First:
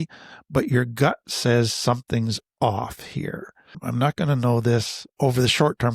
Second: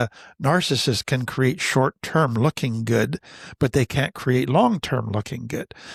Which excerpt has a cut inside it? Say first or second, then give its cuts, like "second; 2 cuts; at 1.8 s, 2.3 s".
first; 2 cuts; at 3.8 s, 5.0 s